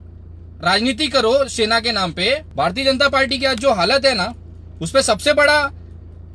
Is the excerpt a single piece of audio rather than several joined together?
no; 1 cut; at 2.5 s

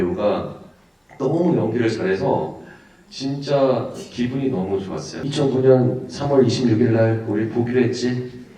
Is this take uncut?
no; 1 cut; at 5.1 s

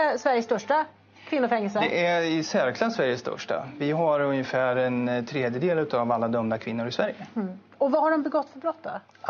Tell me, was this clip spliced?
no; 0 cuts

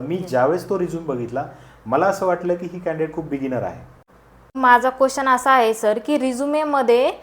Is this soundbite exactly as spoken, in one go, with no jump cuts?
no; 1 cut; at 3.9 s

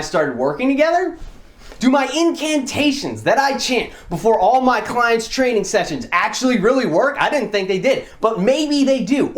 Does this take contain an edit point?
yes; 1 cut; at 1.6 s

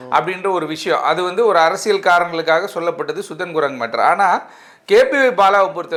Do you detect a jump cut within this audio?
no; 0 cuts

